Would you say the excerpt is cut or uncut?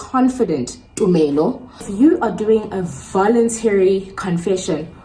cut